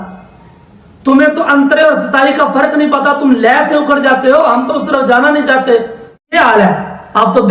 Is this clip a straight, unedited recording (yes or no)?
no